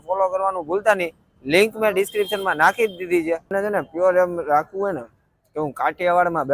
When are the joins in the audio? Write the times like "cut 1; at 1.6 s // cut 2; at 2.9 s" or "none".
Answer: cut 1; at 3.5 s